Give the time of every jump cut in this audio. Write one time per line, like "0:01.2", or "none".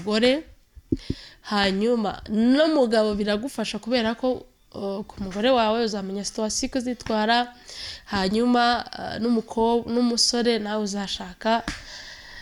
none